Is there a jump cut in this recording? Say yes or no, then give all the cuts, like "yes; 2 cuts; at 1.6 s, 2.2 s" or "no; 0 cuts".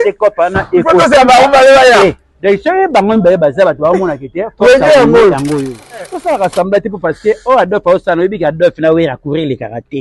yes; 1 cut; at 5.8 s